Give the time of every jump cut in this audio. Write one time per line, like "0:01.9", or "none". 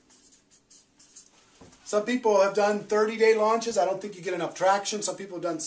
0:02.8